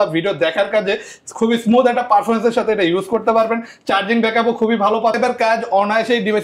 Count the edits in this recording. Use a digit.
1